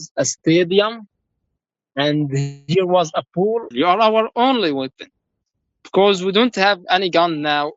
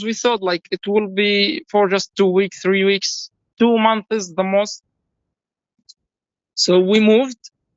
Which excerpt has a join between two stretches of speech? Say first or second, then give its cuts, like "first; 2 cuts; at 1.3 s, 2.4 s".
first; 1 cut; at 3.7 s